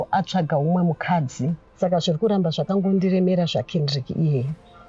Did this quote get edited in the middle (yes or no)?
yes